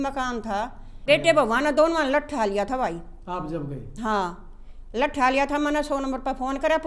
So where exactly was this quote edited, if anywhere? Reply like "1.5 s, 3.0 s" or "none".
0.9 s